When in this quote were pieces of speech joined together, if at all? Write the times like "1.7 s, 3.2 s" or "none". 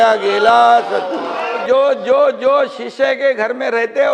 1.6 s